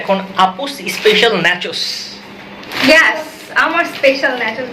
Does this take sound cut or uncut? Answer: cut